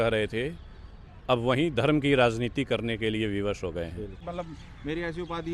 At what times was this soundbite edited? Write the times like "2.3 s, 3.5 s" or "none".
4.2 s